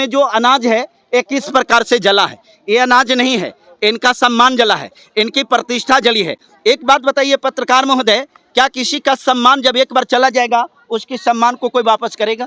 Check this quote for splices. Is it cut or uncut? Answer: uncut